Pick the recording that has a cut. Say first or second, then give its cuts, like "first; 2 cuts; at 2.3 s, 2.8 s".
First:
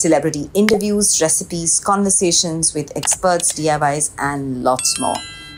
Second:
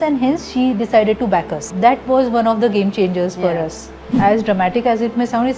second; 2 cuts; at 1.7 s, 4.1 s